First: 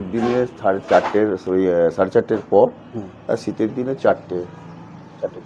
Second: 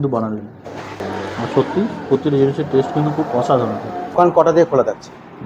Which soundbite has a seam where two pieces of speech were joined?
second; 2 cuts; at 1.0 s, 4.1 s

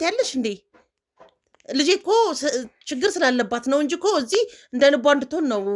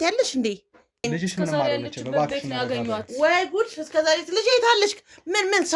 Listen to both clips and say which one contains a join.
second; 1 cut; at 1.1 s

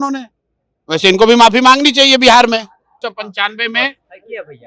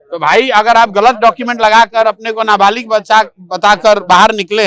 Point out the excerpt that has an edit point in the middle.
first; 1 cut; at 3.0 s

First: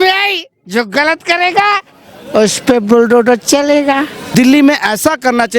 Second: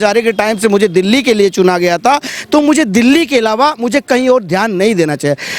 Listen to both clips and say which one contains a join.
first; 1 cut; at 4.2 s

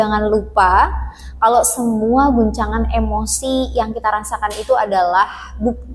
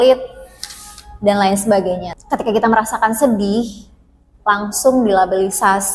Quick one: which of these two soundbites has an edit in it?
second; 1 cut; at 2.1 s

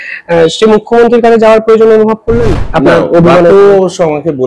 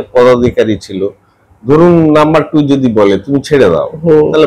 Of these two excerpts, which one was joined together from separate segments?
first; 1 cut; at 2.6 s

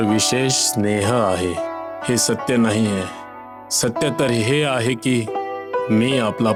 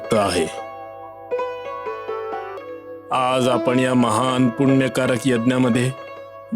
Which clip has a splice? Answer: second; 1 cut; at 2.6 s

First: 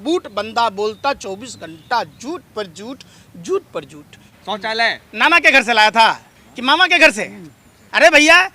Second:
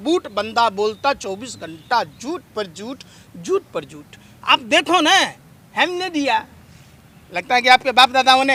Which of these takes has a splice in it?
first; 1 cut; at 4.3 s

